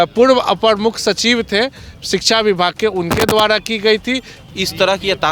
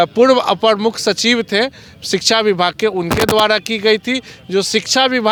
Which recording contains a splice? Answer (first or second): first